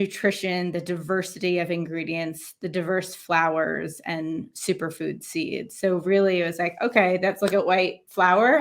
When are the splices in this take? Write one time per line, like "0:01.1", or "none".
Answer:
none